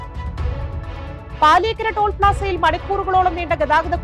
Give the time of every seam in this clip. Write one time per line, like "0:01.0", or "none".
none